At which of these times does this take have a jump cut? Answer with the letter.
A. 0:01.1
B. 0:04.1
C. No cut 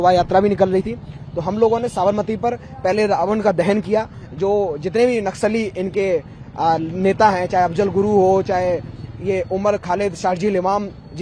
C